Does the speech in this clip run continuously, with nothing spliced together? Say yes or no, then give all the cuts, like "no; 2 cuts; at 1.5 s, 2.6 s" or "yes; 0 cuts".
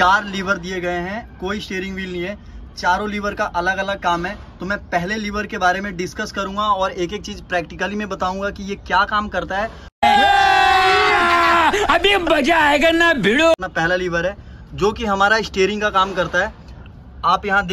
yes; 0 cuts